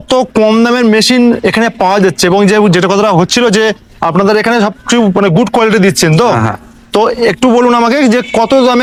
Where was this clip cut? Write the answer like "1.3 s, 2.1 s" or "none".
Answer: none

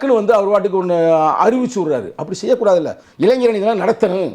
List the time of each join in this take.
3.0 s

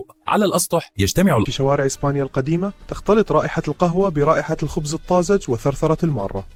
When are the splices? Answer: none

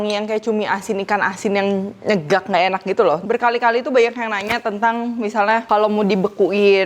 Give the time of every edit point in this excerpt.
3.2 s

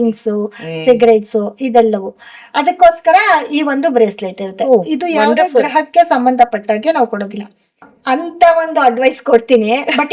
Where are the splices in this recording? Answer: 7.8 s

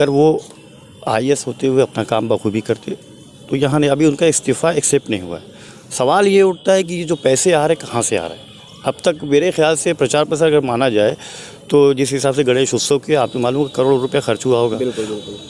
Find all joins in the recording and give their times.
none

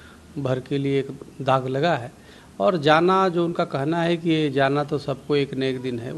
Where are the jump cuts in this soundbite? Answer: 1.9 s

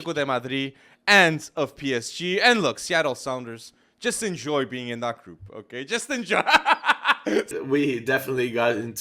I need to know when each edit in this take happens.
7.6 s

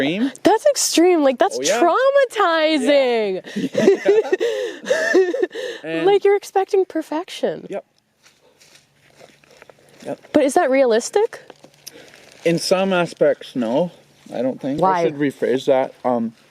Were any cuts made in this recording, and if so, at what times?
14.8 s

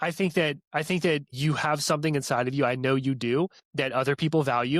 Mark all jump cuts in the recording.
1.3 s, 3.6 s

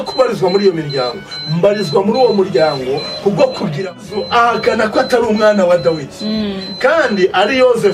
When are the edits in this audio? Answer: 4.0 s

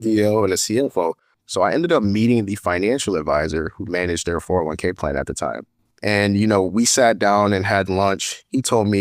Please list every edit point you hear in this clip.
1.3 s, 5.8 s

